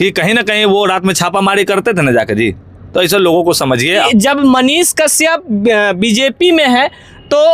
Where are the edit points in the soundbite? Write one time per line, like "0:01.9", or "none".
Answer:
0:04.1